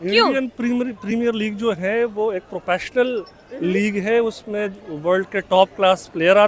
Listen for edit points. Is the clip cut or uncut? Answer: uncut